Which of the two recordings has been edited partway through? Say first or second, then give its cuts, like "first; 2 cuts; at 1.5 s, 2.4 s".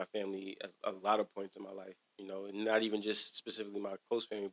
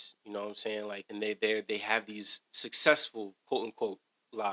second; 1 cut; at 1.0 s